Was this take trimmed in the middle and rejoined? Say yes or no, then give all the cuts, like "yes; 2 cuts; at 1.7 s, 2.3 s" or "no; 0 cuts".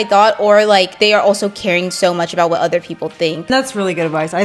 yes; 2 cuts; at 0.9 s, 3.5 s